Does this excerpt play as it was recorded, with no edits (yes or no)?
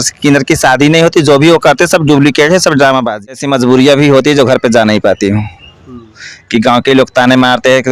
no